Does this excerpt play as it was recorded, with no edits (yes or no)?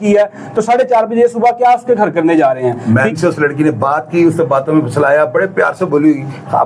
no